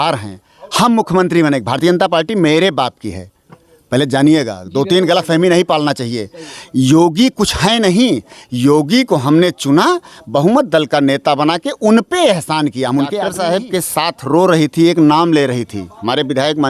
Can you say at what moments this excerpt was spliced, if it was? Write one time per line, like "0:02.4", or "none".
0:13.2